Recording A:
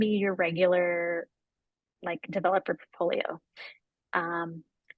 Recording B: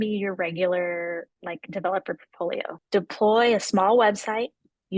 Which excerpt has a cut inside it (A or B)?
B